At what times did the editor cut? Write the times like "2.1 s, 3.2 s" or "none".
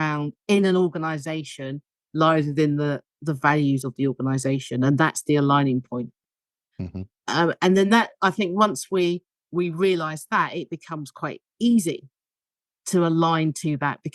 6.2 s